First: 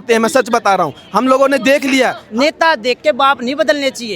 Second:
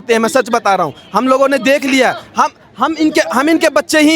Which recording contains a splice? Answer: first; 1 cut; at 2.2 s

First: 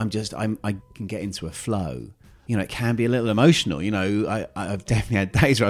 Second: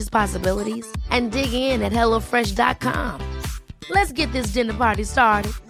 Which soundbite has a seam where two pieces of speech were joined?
first; 2 cuts; at 0.9 s, 2.3 s

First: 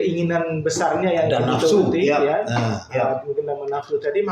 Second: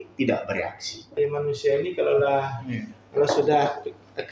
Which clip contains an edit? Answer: second; 1 cut; at 1.1 s

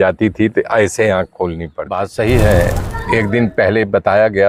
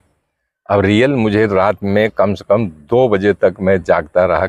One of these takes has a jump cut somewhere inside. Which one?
first; 1 cut; at 1.7 s

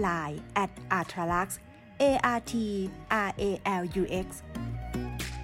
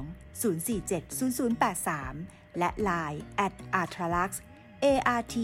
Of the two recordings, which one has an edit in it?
first; 1 cut; at 4.4 s

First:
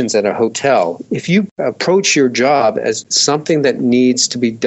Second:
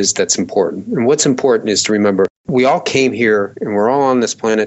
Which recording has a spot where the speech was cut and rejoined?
first; 1 cut; at 3.1 s

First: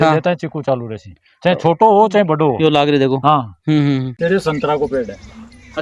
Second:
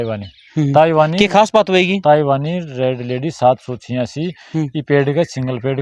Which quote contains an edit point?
first; 1 cut; at 4.1 s

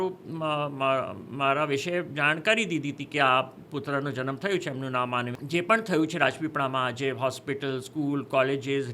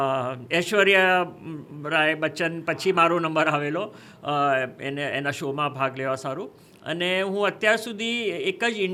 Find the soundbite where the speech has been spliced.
first; 1 cut; at 5.3 s

